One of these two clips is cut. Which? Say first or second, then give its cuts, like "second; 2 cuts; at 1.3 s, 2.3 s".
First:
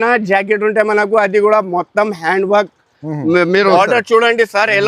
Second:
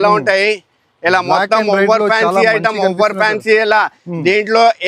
first; 1 cut; at 3.7 s